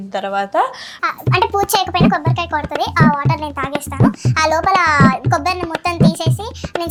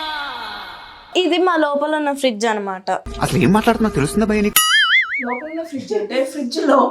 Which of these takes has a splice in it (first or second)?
second